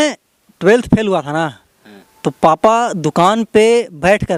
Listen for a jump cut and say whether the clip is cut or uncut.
uncut